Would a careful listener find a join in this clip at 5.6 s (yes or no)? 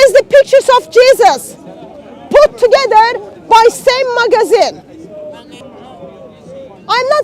yes